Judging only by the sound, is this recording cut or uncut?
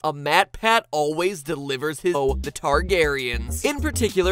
uncut